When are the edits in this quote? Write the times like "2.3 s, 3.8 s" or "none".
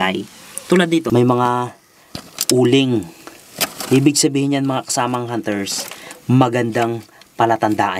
1.1 s